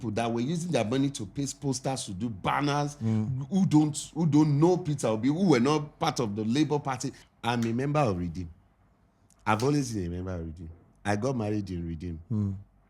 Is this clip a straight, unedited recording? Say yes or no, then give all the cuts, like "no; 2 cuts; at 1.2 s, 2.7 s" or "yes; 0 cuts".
no; 1 cut; at 7.1 s